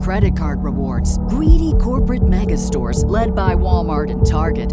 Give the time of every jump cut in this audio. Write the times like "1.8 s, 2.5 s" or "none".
none